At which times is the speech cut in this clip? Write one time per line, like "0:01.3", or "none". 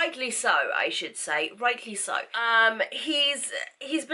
none